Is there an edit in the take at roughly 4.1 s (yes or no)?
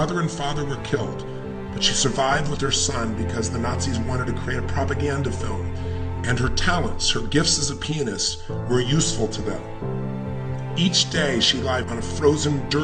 yes